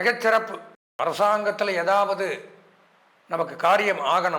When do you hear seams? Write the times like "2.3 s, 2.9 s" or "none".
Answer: 0.9 s